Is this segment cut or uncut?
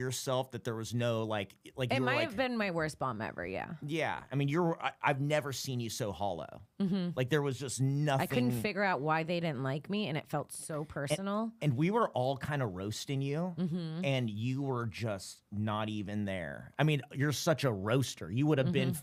uncut